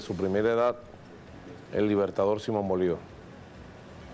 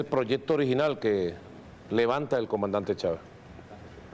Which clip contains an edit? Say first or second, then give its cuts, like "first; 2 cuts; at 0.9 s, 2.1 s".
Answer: first; 1 cut; at 3.1 s